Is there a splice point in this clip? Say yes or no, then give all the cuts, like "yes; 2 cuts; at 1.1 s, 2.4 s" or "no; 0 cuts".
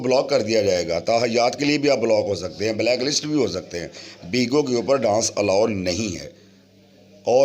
no; 0 cuts